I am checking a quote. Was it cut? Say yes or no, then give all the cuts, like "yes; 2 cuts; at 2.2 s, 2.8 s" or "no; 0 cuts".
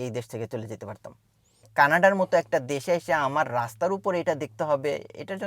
yes; 1 cut; at 1.6 s